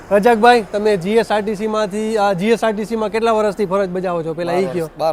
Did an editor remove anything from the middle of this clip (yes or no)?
no